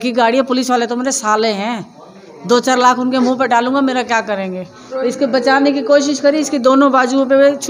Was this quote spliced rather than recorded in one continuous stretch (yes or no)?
no